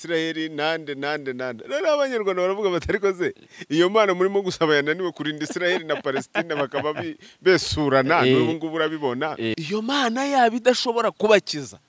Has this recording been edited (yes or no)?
yes